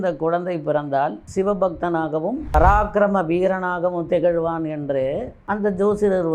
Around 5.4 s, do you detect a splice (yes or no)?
no